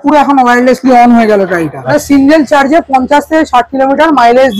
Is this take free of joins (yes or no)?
no